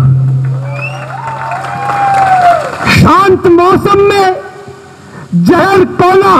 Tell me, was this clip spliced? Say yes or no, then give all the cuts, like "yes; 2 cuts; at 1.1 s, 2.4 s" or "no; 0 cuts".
yes; 1 cut; at 2.8 s